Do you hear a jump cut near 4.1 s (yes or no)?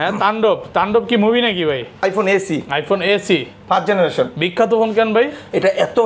no